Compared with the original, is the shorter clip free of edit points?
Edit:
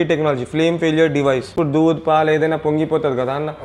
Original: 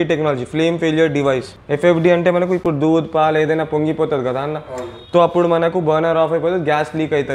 no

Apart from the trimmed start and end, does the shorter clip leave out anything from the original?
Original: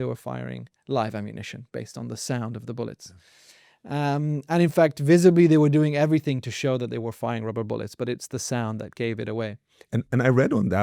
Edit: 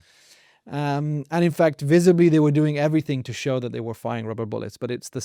no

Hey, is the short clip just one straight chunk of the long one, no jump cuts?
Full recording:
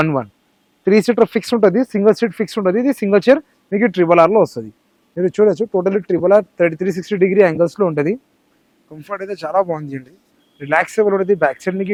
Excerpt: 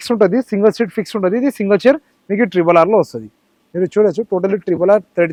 yes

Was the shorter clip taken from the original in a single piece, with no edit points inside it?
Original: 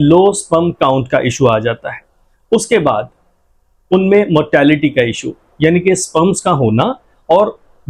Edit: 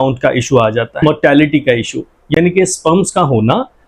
no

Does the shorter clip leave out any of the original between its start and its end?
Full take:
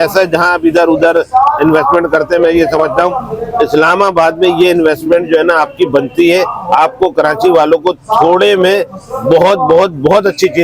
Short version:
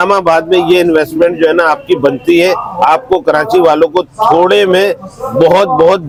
no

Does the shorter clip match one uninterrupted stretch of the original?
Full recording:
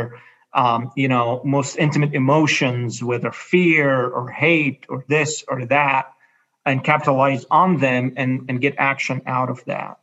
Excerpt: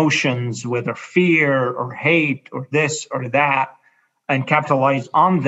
yes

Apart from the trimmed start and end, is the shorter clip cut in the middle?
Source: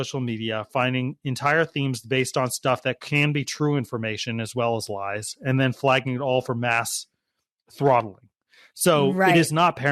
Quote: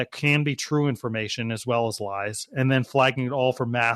no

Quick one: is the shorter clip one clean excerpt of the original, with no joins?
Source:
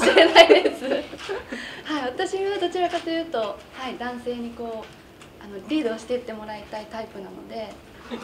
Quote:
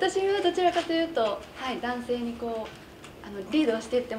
yes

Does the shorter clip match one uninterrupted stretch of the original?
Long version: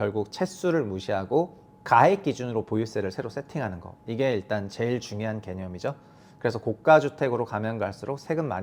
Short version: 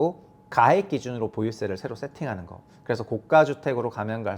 no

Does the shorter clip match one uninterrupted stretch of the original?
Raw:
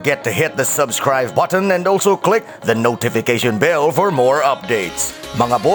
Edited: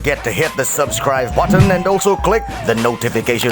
yes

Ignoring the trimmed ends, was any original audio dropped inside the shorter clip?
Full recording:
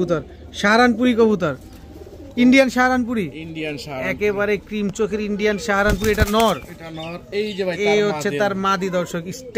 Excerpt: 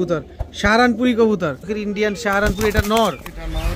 yes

